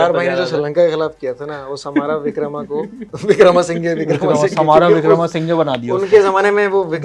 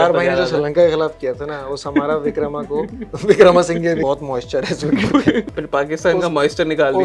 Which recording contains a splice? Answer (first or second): second